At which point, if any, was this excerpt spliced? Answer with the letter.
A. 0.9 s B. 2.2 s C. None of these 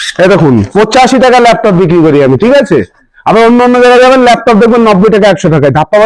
C